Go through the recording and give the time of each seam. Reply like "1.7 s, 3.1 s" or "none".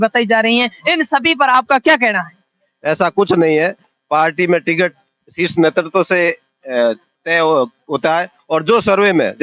none